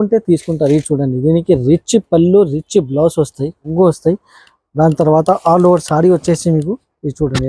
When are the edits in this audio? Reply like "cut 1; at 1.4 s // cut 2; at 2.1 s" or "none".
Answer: cut 1; at 3.7 s